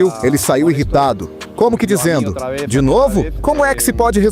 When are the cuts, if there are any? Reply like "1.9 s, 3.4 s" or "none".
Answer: none